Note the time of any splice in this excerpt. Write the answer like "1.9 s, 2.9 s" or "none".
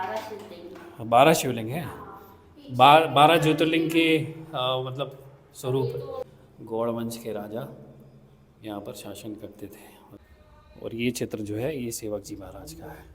6.3 s, 10.0 s